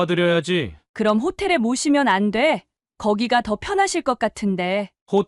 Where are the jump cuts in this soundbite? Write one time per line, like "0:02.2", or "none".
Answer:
none